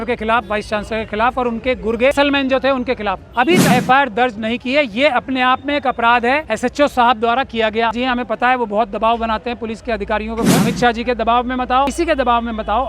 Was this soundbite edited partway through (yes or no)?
yes